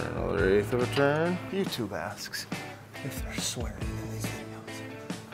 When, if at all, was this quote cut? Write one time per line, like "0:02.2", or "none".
0:01.4